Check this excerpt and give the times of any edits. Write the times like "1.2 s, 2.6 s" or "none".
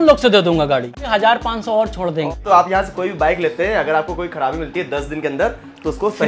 1.1 s, 2.4 s